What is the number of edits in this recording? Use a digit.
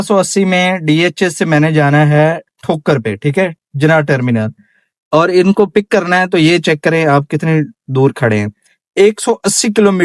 0